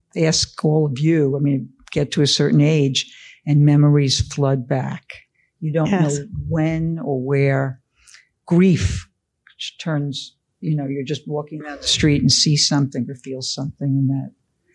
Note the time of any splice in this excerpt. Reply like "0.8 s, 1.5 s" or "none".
none